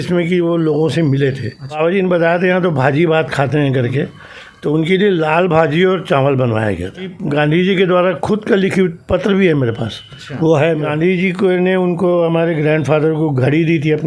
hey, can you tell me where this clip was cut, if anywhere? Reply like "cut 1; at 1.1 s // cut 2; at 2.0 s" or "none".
cut 1; at 1.8 s // cut 2; at 7.1 s // cut 3; at 10.9 s